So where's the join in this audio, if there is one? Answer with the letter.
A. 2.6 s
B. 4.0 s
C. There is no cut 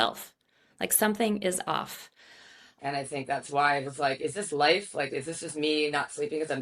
A